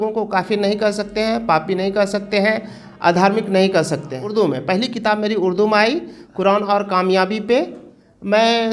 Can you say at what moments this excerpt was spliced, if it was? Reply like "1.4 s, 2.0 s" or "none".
4.2 s